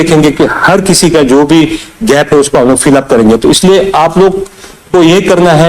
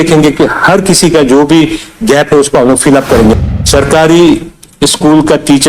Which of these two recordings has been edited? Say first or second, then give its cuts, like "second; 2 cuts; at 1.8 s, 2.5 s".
second; 1 cut; at 3.4 s